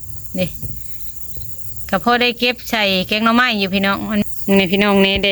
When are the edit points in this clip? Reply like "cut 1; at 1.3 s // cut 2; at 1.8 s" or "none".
cut 1; at 4.2 s